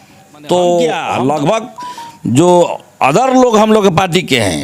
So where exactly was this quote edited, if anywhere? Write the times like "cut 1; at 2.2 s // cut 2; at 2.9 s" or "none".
cut 1; at 1.1 s

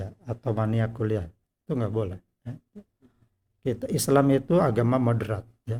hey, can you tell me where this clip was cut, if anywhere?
none

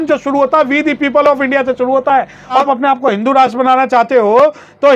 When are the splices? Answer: cut 1; at 2.6 s

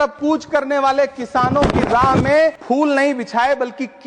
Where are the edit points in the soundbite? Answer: cut 1; at 2.6 s

